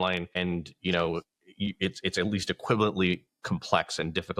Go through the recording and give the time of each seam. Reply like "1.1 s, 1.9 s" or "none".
none